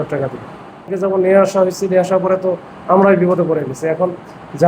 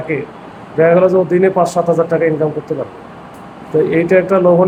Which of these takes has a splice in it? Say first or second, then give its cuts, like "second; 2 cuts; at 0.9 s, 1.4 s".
first; 1 cut; at 0.9 s